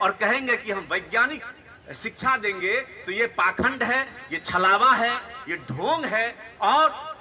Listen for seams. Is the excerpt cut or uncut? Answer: uncut